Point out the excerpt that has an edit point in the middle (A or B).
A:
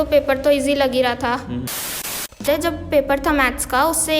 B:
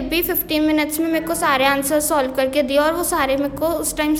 A